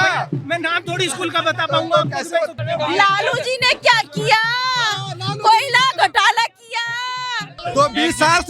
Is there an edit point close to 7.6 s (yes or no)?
yes